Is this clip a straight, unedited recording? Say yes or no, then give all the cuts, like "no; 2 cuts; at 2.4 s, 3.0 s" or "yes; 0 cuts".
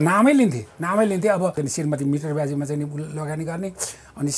no; 1 cut; at 1.6 s